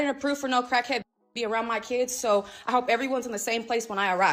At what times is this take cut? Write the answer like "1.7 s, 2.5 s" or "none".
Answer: none